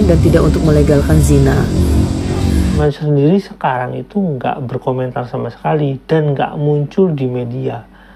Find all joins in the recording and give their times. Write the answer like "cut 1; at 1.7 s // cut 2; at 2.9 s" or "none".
cut 1; at 2.8 s